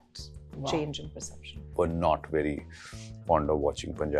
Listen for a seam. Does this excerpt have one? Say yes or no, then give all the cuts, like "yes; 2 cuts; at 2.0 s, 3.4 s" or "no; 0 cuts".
yes; 1 cut; at 1.7 s